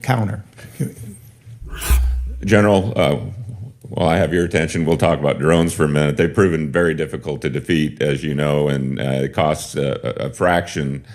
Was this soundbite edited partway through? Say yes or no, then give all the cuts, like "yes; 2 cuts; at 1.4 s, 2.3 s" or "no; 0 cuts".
yes; 1 cut; at 1.8 s